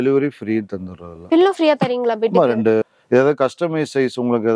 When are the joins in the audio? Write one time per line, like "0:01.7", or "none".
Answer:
0:02.9